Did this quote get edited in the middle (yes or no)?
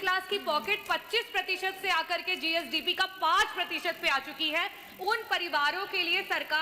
no